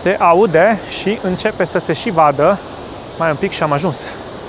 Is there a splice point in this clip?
yes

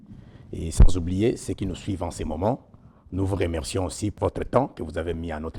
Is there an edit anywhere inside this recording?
yes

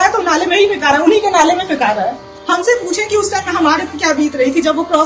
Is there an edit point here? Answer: yes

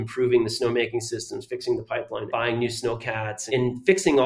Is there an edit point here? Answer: yes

